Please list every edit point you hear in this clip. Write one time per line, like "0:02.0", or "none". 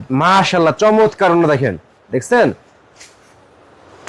none